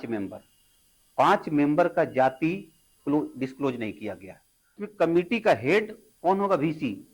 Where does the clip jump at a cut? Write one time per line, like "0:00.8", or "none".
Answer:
0:04.8